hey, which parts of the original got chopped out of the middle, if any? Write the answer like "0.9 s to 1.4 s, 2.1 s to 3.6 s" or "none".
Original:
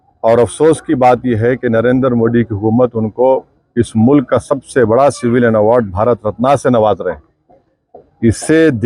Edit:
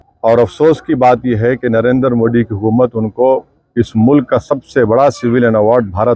none